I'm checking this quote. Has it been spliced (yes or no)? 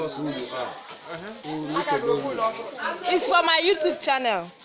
no